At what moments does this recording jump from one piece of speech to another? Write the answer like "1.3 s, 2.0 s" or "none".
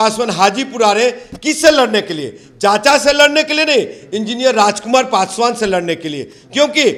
none